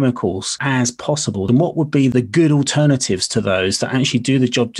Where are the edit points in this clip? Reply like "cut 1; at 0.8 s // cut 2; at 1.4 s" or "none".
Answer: cut 1; at 1.1 s // cut 2; at 2.1 s